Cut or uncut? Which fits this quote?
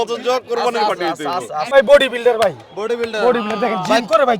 cut